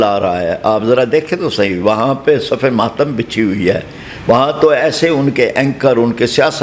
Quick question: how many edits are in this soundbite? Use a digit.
0